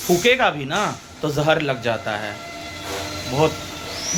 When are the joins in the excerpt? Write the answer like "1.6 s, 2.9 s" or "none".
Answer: none